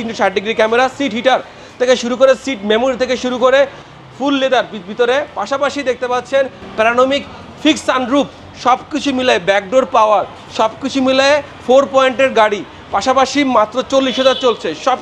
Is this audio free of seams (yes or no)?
yes